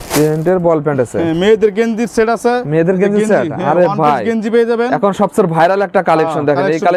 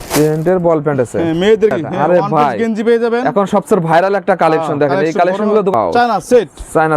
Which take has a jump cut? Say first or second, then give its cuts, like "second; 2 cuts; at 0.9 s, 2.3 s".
second; 2 cuts; at 1.7 s, 5.7 s